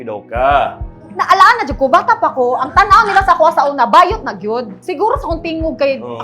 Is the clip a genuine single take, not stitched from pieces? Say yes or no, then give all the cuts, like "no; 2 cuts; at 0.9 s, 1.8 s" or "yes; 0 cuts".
no; 1 cut; at 4.7 s